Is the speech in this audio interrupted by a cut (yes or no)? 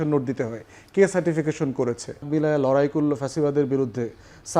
yes